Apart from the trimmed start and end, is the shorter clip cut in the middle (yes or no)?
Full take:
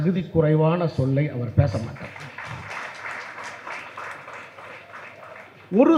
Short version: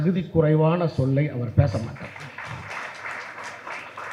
no